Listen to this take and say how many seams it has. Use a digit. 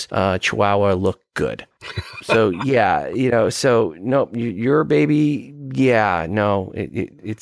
1